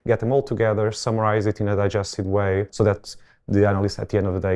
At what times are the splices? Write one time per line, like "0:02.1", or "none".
0:02.7